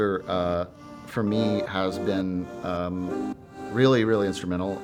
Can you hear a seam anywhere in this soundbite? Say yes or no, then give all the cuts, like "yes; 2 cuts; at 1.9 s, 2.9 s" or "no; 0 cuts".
no; 0 cuts